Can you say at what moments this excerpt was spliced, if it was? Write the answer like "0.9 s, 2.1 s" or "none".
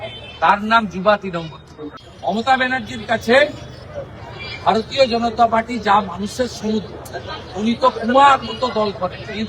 2.0 s